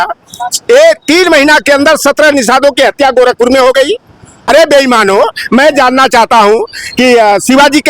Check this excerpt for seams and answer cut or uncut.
cut